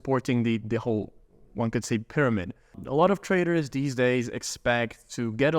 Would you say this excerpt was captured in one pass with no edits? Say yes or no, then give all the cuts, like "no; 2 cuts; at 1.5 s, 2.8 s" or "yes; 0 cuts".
no; 1 cut; at 2.8 s